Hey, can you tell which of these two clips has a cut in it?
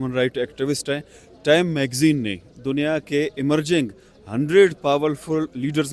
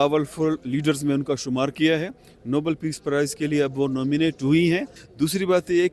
second; 1 cut; at 5.0 s

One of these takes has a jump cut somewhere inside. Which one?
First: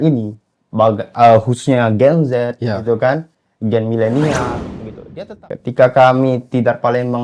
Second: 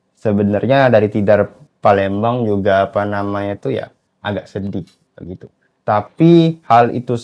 first; 1 cut; at 5.0 s

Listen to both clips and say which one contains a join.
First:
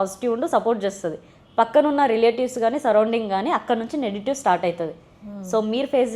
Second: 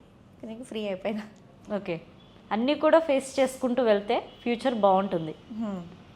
second; 1 cut; at 1.6 s

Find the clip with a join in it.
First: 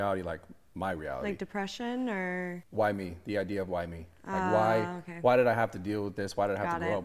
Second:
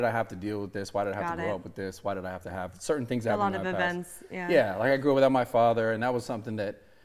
first; 1 cut; at 2.5 s

